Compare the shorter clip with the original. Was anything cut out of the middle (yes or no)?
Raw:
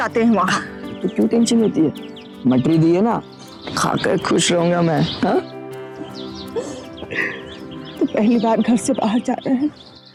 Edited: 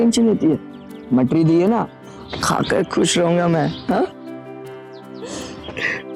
no